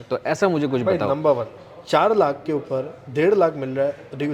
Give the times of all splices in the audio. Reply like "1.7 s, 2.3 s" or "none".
1.5 s